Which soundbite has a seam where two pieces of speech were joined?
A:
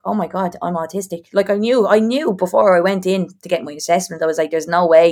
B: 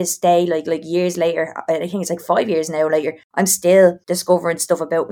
B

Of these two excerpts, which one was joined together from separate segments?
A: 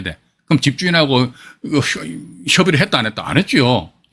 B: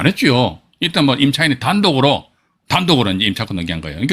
B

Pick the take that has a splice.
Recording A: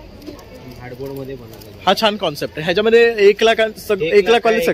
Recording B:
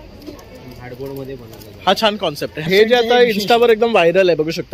B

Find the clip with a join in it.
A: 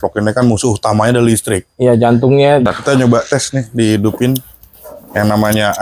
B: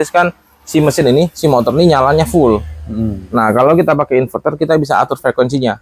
A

